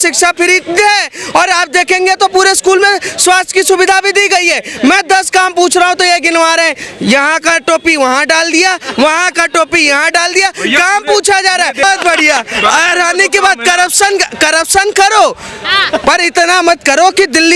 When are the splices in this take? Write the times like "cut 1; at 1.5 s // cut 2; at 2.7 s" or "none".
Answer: cut 1; at 11.8 s